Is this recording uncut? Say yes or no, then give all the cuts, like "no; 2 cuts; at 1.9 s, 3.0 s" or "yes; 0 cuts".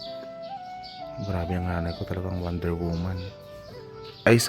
no; 1 cut; at 1.2 s